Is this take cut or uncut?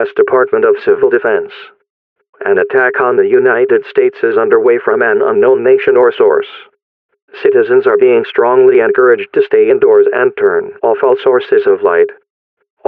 uncut